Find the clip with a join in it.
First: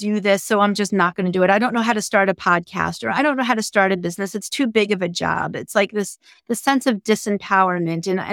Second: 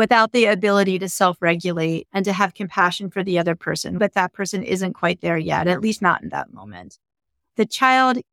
second; 2 cuts; at 2.1 s, 4.0 s

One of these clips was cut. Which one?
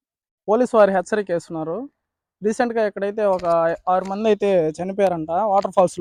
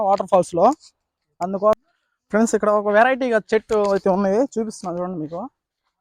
second; 1 cut; at 1.8 s

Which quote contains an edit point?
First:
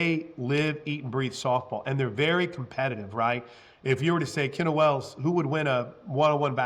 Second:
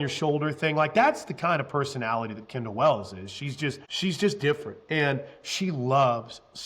second; 1 cut; at 3.9 s

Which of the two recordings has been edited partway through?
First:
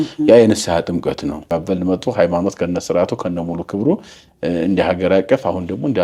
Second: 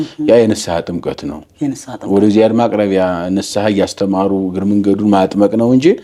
first; 1 cut; at 1.5 s

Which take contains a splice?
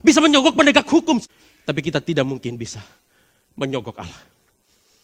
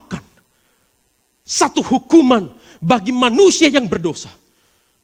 first; 1 cut; at 1.2 s

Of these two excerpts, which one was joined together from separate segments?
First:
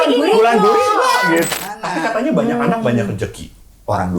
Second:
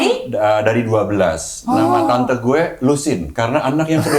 first; 1 cut; at 1.6 s

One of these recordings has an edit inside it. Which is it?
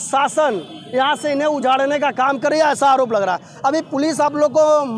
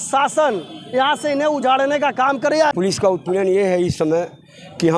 second; 1 cut; at 2.7 s

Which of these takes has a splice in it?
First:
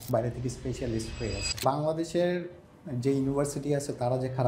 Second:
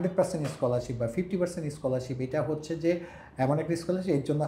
first; 1 cut; at 1.6 s

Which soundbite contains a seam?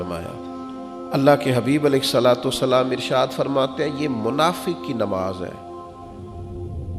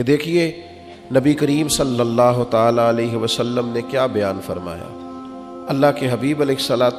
first; 1 cut; at 6.0 s

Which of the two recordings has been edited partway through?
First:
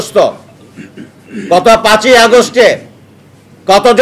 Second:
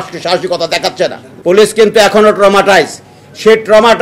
second; 1 cut; at 1.3 s

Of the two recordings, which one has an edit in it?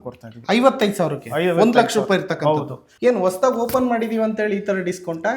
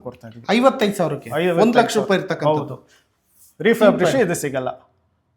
first; 1 cut; at 2.8 s

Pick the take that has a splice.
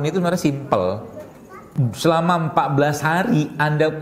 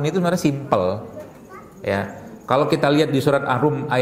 first; 1 cut; at 1.7 s

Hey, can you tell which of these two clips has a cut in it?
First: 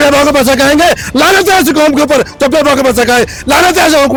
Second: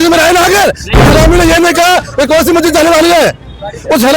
second; 1 cut; at 1.1 s

